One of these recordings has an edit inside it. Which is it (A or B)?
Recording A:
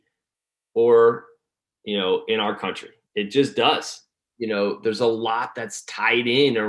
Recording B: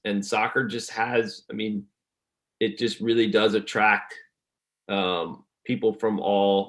A